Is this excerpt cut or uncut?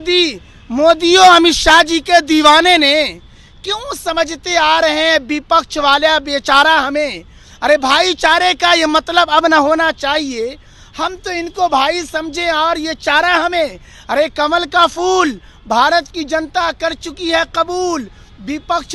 uncut